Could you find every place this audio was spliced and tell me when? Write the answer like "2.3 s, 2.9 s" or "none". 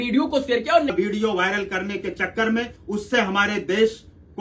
0.9 s, 2.8 s